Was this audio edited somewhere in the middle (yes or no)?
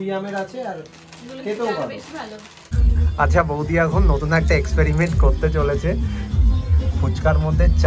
yes